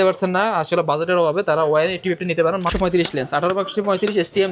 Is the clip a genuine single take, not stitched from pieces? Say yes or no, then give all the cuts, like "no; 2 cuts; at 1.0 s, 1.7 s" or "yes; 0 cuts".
no; 1 cut; at 2.7 s